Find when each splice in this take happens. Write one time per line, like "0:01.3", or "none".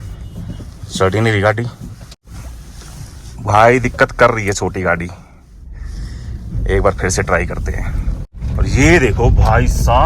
0:02.1
0:08.4

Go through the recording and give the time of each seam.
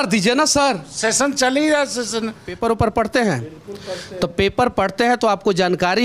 0:02.5

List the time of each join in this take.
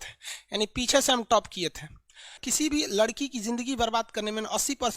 0:02.4

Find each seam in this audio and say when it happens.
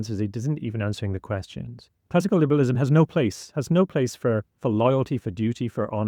0:01.9

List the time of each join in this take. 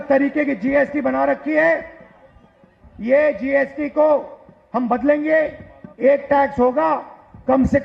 none

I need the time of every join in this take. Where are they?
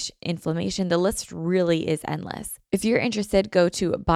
0:02.5

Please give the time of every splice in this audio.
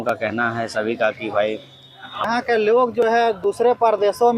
0:02.3

